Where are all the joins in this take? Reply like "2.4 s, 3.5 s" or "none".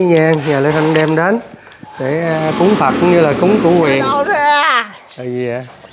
4.1 s